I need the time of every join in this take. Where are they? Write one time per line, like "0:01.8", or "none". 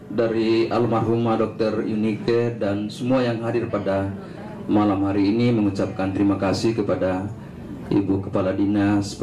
none